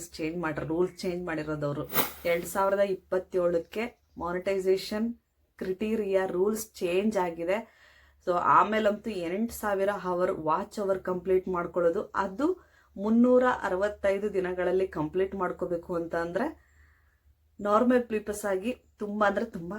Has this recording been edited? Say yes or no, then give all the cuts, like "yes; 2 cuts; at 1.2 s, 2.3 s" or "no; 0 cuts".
yes; 1 cut; at 2.0 s